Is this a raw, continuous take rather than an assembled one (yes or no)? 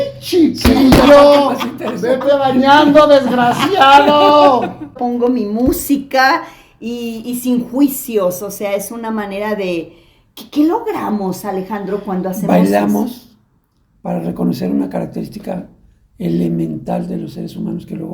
no